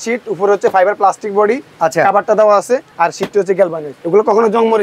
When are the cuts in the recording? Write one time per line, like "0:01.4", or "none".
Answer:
0:02.9
0:03.9